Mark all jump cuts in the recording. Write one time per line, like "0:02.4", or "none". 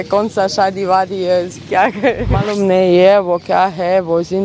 0:02.5